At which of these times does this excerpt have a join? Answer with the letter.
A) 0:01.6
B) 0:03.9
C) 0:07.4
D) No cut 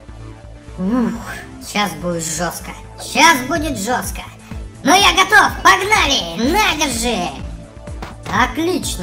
D